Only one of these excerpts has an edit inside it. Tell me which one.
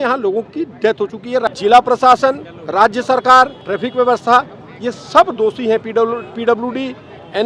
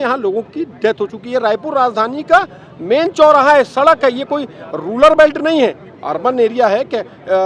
first; 3 cuts; at 1.5 s, 2.5 s, 3.6 s

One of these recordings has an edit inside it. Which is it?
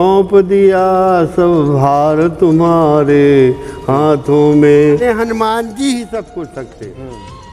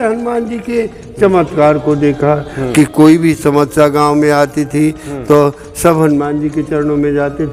first; 1 cut; at 5.0 s

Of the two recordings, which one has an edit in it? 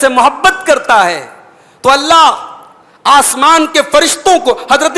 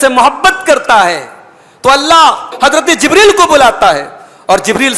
second; 1 cut; at 2.5 s

